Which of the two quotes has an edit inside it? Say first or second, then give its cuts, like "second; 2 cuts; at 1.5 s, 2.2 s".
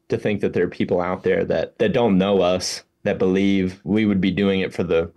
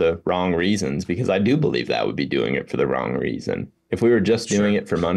first; 2 cuts; at 1.7 s, 3.8 s